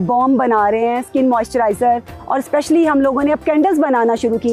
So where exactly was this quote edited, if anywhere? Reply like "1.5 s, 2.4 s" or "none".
2.2 s

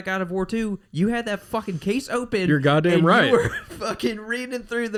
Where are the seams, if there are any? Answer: none

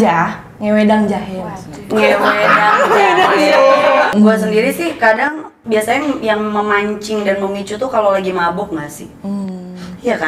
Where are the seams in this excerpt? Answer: none

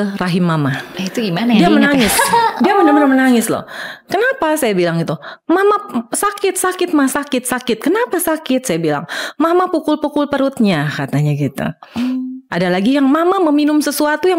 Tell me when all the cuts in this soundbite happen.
none

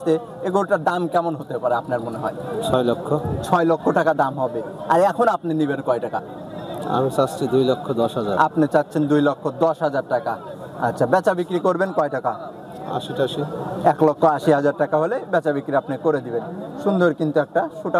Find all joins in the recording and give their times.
none

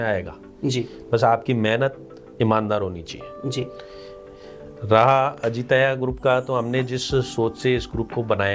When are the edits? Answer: none

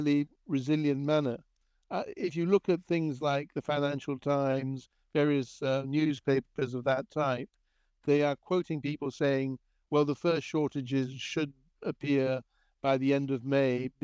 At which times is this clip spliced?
none

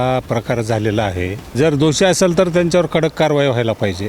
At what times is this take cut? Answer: 1.5 s

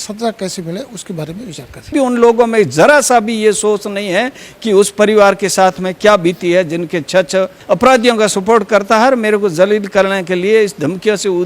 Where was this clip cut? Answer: 1.9 s, 7.6 s

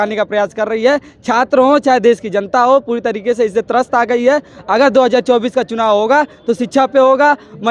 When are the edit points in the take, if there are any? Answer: none

